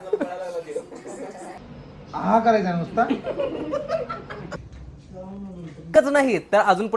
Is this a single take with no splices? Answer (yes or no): no